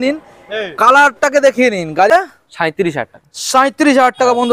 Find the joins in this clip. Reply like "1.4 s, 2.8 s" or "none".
2.1 s